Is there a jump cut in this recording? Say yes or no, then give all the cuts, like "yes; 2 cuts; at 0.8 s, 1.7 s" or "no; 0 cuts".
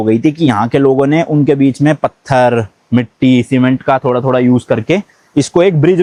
no; 0 cuts